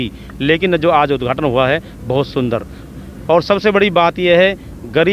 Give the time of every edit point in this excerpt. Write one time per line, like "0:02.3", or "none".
none